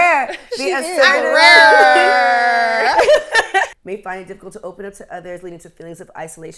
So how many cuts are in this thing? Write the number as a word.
one